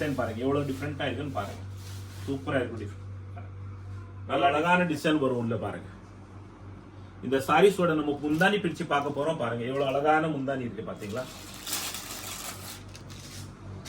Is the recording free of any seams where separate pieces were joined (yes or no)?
no